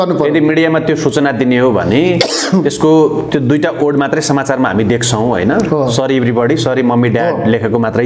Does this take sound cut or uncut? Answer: uncut